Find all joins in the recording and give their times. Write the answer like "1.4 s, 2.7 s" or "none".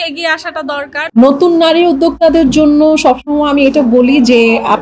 1.1 s